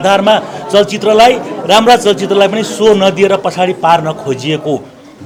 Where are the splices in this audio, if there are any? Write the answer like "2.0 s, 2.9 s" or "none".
none